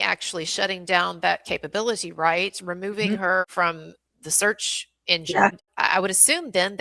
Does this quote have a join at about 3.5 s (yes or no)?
yes